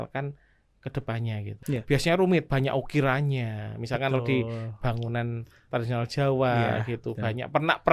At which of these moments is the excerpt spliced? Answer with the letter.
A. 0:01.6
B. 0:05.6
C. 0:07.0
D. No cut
A